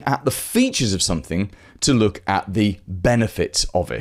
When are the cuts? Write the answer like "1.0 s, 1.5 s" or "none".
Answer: none